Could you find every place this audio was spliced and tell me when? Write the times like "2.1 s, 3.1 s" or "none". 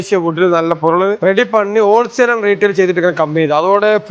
none